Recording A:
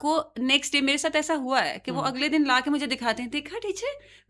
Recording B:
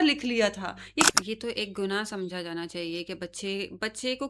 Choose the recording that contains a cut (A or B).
B